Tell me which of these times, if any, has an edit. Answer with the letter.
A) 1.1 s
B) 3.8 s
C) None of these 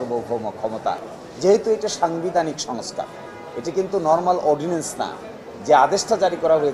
A